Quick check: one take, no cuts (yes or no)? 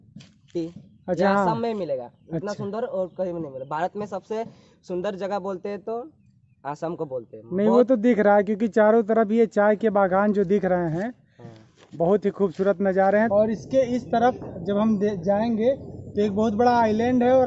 no